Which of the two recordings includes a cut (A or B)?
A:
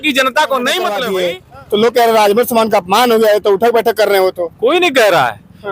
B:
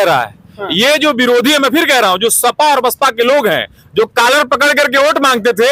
A